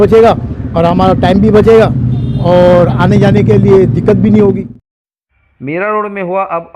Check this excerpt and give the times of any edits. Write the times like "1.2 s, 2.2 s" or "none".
4.7 s